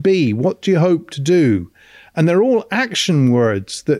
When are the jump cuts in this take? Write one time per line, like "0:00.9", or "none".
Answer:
none